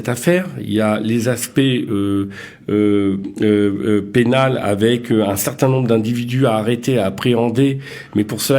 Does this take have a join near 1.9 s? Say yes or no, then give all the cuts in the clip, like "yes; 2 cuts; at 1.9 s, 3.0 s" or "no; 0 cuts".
no; 0 cuts